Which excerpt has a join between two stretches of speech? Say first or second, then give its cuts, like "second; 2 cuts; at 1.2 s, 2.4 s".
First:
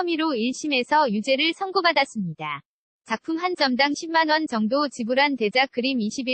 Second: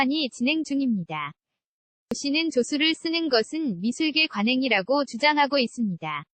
second; 1 cut; at 2.1 s